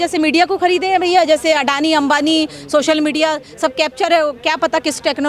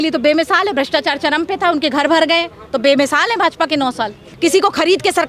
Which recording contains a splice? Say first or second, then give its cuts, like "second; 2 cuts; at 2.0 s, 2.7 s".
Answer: second; 1 cut; at 4.2 s